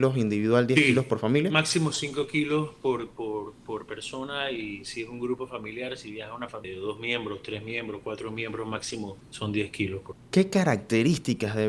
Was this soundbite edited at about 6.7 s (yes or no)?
yes